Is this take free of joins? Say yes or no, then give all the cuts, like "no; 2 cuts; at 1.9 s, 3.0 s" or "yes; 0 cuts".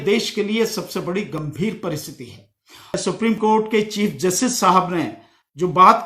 no; 1 cut; at 3.0 s